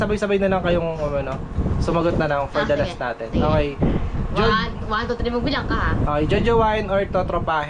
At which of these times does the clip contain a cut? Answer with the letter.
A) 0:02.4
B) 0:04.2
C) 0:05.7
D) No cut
D